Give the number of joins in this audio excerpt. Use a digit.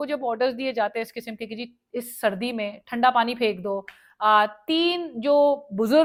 0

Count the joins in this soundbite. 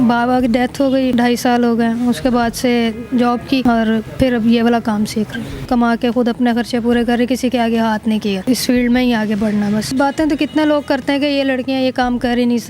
3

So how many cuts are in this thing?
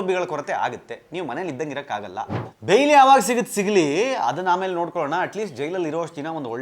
1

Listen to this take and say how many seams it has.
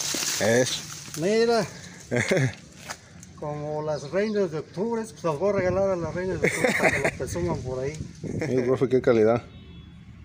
1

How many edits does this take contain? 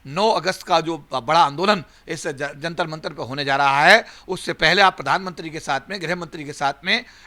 0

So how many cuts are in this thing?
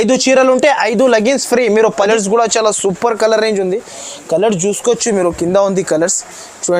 1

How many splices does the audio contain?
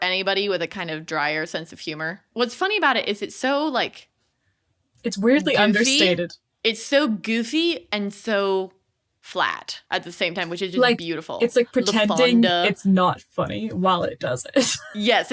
2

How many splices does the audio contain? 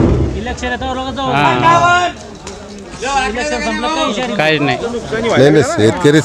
1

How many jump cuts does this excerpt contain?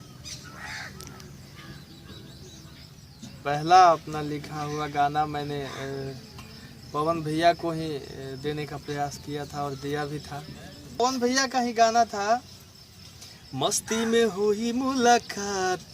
1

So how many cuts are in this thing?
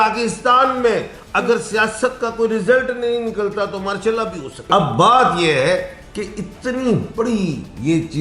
1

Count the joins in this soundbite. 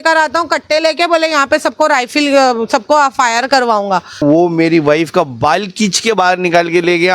1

